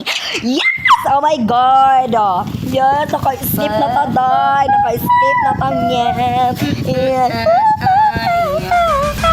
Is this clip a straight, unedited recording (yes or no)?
yes